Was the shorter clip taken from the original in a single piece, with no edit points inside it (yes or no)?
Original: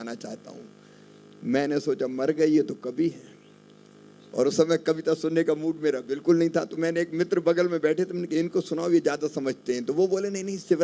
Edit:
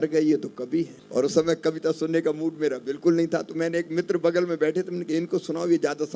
no